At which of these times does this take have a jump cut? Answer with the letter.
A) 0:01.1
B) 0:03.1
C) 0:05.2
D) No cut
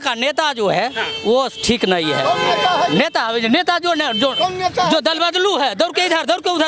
D